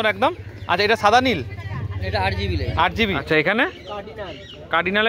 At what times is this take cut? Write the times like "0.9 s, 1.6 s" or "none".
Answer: 3.2 s